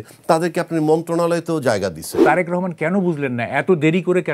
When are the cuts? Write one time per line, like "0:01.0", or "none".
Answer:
0:02.2